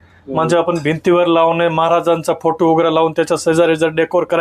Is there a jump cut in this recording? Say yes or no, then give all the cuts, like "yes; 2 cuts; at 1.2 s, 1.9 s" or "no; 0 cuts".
no; 0 cuts